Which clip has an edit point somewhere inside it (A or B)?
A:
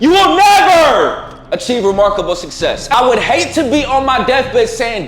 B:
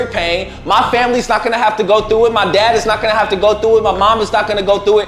A